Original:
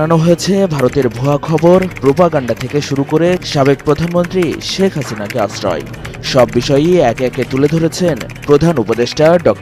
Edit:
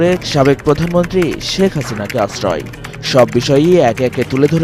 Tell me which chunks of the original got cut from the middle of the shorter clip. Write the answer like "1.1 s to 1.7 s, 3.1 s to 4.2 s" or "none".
none